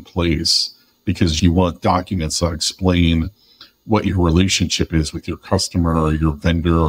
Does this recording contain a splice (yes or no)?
yes